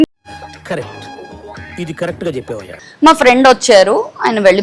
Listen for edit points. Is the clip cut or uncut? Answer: cut